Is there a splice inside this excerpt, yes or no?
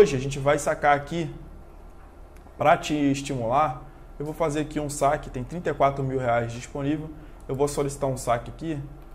no